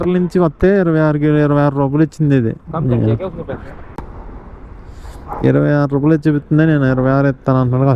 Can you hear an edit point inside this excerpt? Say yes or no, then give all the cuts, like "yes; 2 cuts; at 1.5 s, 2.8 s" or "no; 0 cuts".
yes; 1 cut; at 3.8 s